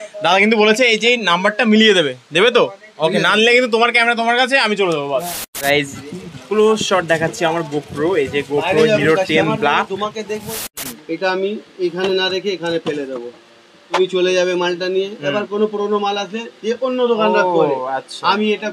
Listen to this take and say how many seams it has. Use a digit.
3